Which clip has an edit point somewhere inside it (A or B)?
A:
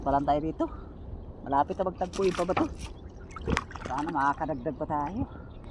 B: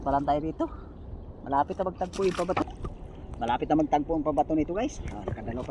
B